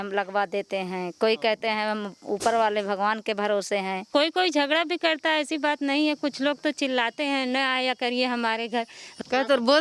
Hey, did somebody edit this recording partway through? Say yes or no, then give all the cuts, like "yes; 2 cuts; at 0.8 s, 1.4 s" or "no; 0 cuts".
no; 0 cuts